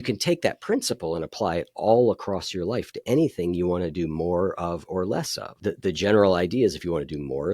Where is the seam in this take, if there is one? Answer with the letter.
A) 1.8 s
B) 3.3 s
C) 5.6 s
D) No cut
C